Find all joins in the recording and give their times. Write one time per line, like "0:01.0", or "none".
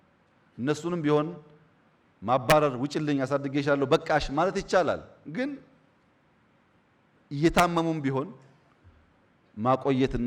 none